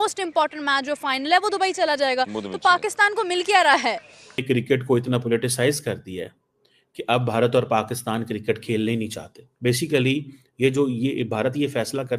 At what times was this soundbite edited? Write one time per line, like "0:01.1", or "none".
0:04.3

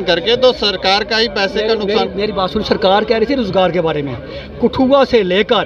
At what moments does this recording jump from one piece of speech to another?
none

